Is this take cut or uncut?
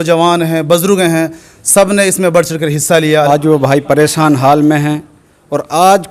cut